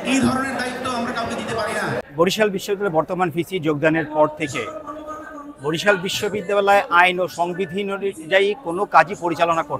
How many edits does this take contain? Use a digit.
1